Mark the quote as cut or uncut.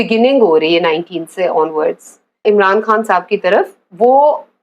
cut